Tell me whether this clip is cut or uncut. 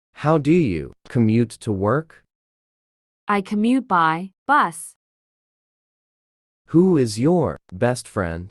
cut